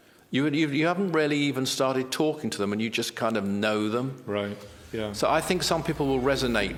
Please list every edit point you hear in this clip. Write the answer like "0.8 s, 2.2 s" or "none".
none